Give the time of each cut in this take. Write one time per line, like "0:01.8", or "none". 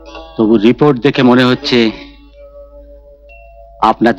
none